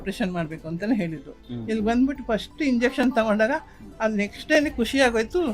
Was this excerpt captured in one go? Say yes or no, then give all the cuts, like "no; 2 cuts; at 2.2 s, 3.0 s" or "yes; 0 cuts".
no; 1 cut; at 1.5 s